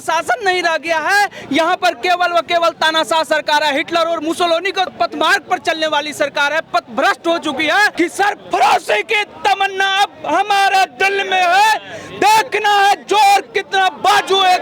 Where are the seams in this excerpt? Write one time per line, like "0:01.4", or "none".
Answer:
0:04.9
0:07.9